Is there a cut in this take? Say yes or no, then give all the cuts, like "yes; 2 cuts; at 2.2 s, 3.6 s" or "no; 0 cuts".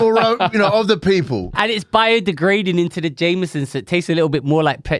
no; 0 cuts